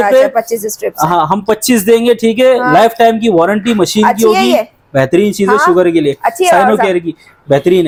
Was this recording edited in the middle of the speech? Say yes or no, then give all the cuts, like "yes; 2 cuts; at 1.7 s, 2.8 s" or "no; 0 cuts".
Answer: no; 0 cuts